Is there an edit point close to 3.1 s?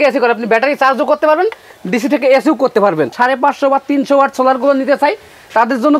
yes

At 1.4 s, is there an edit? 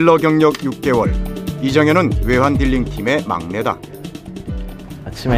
yes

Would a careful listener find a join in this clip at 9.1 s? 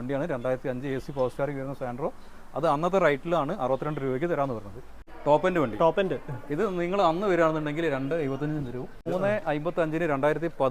yes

